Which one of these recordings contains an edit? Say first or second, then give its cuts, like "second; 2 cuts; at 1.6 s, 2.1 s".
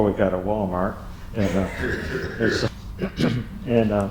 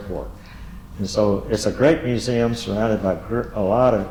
first; 1 cut; at 2.7 s